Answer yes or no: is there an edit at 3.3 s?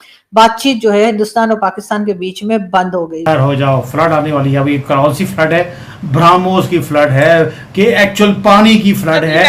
yes